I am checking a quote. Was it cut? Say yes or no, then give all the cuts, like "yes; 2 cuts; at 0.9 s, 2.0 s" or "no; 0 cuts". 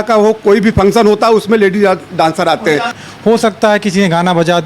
yes; 1 cut; at 3.0 s